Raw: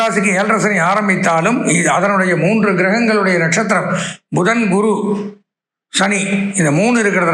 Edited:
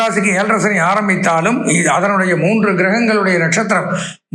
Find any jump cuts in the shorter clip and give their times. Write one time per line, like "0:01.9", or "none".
none